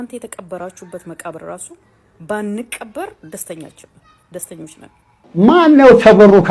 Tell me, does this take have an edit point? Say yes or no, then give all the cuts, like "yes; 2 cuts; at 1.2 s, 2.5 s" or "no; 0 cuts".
yes; 1 cut; at 5.1 s